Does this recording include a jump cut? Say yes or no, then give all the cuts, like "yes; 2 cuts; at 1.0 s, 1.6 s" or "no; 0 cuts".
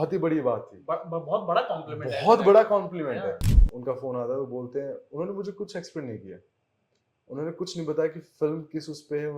yes; 1 cut; at 3.7 s